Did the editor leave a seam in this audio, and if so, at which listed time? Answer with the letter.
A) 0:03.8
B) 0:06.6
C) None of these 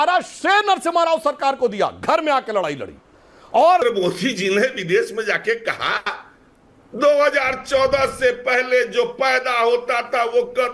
A